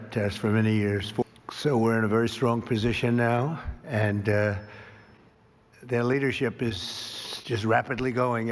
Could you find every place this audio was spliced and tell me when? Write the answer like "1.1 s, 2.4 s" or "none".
1.2 s